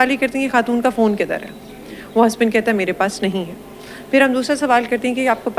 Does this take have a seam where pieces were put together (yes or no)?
no